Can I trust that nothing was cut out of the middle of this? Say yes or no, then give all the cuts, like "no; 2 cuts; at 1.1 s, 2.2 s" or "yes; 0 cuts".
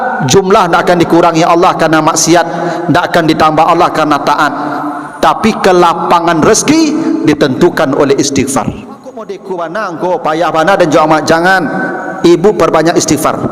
no; 1 cut; at 9.4 s